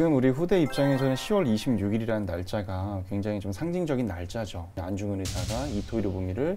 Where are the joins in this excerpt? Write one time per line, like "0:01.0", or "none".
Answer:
0:04.8